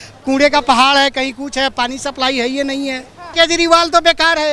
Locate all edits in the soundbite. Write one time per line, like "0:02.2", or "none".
0:03.3